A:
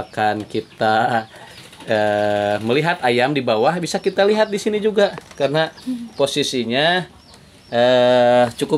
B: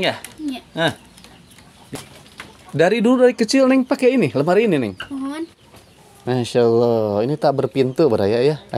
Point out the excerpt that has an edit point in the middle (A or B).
B